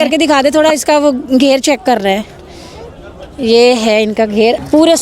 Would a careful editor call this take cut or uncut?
cut